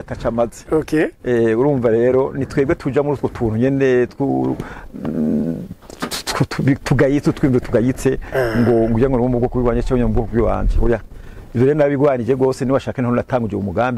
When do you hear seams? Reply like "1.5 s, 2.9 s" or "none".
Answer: none